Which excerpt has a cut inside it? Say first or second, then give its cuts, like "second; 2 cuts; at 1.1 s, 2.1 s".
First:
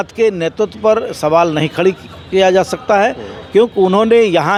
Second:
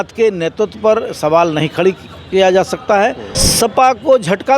second; 1 cut; at 3.3 s